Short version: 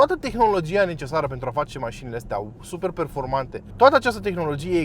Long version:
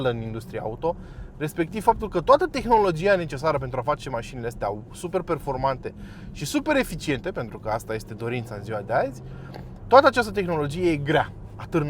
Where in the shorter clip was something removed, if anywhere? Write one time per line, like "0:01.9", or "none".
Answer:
0:03.6